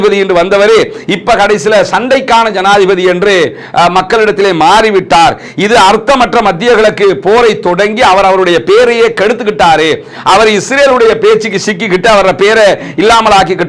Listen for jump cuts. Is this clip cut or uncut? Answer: uncut